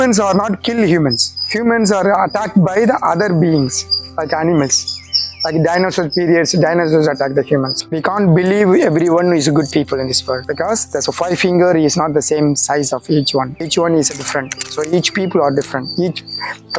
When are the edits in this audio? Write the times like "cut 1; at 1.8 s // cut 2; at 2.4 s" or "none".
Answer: cut 1; at 7.8 s